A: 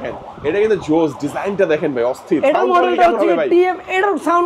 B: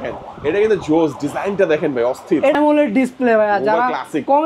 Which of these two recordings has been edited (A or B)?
B